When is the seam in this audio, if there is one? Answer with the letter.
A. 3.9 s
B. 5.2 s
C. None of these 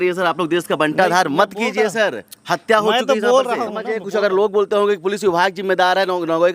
A